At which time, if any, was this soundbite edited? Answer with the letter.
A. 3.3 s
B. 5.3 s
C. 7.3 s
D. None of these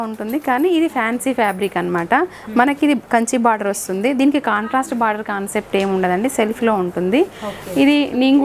D